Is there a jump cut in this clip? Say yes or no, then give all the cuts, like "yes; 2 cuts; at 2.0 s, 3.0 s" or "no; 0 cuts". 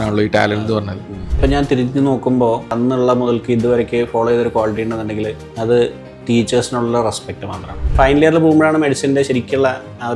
yes; 4 cuts; at 1.4 s, 2.7 s, 5.4 s, 7.9 s